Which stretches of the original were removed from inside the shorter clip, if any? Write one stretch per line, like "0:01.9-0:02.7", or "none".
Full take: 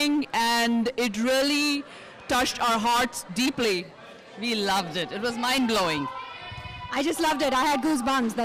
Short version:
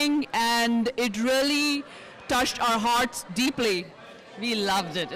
none